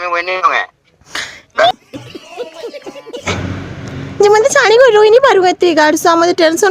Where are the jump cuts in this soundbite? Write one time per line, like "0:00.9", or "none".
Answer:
0:01.7
0:03.2